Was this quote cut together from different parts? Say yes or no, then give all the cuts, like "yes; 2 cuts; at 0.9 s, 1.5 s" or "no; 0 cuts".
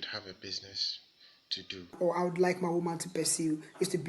yes; 1 cut; at 2.0 s